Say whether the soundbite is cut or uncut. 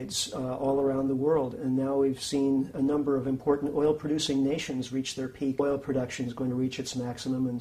uncut